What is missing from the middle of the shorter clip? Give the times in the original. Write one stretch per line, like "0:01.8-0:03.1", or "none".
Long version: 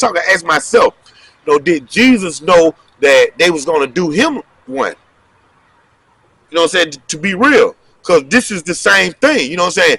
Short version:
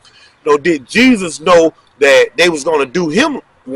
none